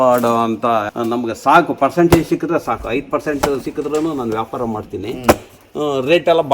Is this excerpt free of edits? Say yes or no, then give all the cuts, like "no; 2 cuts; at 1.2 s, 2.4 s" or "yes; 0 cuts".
no; 1 cut; at 0.9 s